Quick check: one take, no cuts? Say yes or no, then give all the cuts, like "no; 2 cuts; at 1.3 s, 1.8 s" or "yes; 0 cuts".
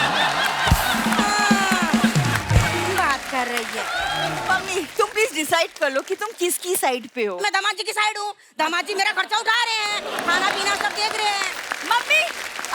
no; 1 cut; at 4.4 s